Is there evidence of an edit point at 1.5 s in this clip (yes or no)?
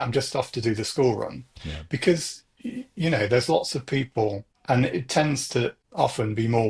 no